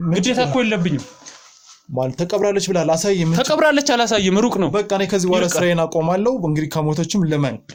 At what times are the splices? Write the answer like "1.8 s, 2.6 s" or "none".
none

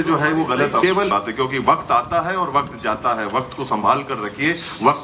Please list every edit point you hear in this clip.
0.9 s

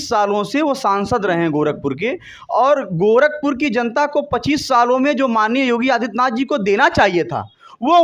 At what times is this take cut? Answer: none

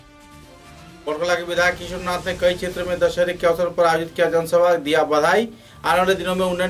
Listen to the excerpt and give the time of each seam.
1.0 s

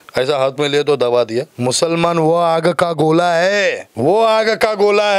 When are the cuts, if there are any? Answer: 1.5 s, 3.9 s

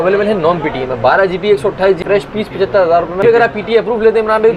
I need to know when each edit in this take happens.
2.0 s, 3.2 s

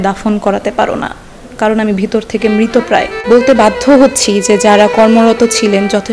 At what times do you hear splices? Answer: 3.1 s

